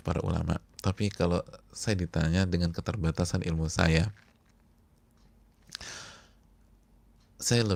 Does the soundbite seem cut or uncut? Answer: uncut